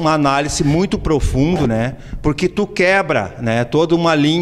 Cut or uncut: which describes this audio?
uncut